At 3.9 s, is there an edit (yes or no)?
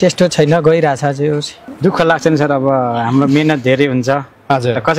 no